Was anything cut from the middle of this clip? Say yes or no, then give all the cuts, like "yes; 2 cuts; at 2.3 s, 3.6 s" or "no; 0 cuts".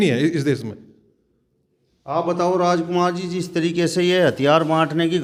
no; 0 cuts